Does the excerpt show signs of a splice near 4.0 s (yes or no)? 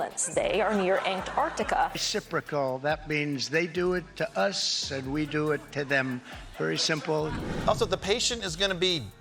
no